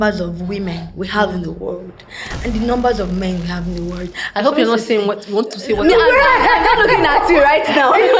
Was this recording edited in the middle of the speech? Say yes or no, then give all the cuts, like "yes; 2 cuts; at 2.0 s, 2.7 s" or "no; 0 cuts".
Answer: no; 0 cuts